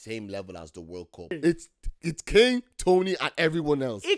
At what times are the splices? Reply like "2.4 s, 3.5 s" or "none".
1.3 s